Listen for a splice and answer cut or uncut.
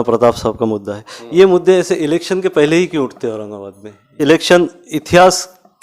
cut